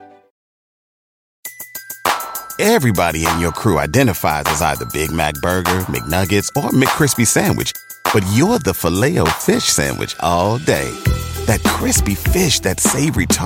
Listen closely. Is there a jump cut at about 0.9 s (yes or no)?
no